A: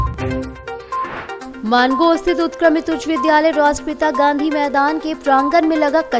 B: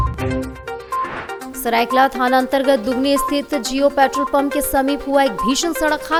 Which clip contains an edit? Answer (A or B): A